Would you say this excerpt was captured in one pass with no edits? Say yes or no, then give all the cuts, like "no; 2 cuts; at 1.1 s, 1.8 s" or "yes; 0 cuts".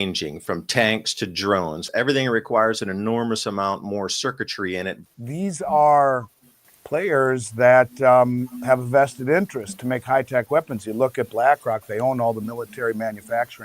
no; 2 cuts; at 1.8 s, 5.0 s